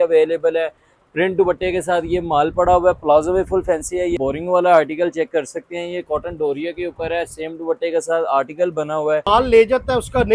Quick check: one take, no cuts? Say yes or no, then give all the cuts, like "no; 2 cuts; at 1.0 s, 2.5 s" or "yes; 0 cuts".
no; 2 cuts; at 4.1 s, 9.3 s